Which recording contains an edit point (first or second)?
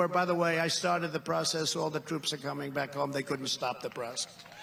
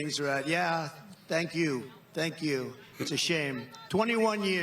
second